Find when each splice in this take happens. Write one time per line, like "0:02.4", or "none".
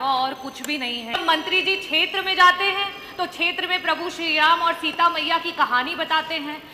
0:01.2